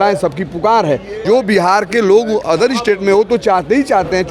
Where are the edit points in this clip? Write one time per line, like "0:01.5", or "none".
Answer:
0:01.2

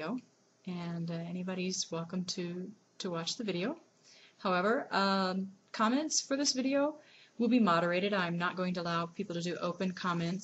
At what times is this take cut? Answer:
none

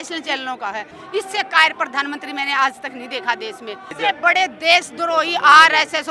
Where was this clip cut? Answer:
0:01.0
0:03.9

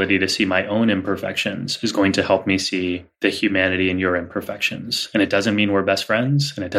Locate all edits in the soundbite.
0:03.1

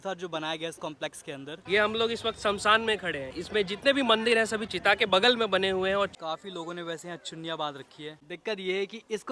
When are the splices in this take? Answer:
0:01.6
0:03.3
0:06.2
0:08.2

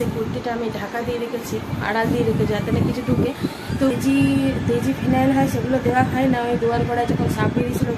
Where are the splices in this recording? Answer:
0:03.9

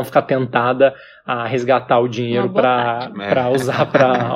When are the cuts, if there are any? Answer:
none

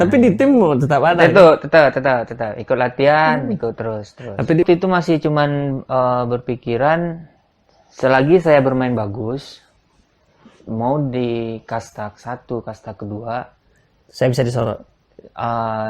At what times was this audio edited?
0:04.6

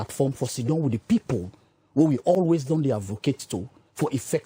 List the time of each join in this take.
none

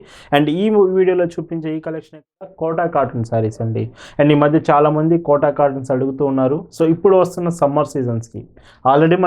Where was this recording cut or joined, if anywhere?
0:02.5

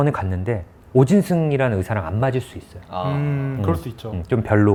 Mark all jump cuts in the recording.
none

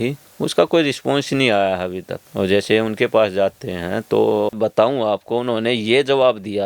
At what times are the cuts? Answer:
0:04.6

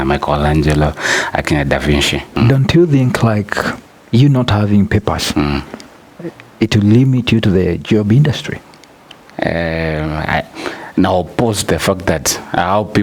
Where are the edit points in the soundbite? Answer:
0:02.3

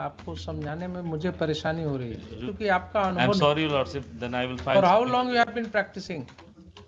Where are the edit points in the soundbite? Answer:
0:02.5

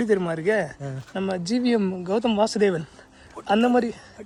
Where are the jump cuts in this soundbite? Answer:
none

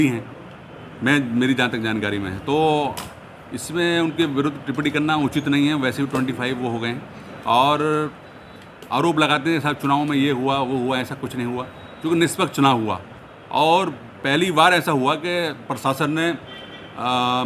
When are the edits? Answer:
none

